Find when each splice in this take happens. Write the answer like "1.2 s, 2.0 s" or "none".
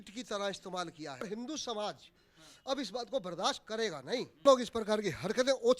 1.2 s, 4.4 s